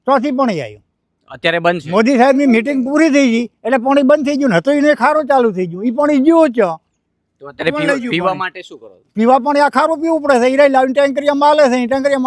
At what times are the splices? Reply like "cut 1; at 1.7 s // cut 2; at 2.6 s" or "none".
none